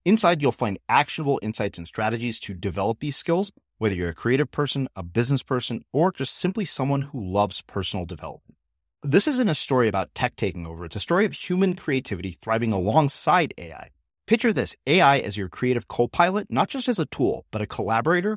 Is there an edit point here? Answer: no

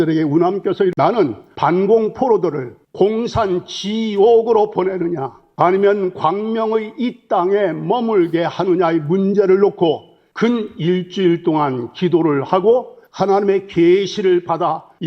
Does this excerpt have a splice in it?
yes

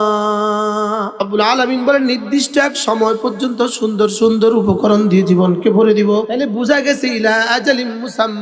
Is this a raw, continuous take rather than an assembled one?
no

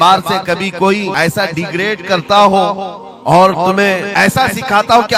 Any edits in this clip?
yes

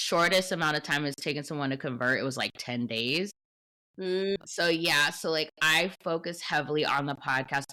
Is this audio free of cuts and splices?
yes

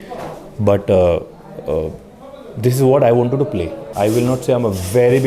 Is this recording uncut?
no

